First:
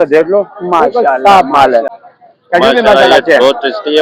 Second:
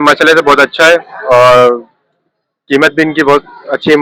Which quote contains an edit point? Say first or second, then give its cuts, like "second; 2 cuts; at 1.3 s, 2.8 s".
first; 1 cut; at 2.0 s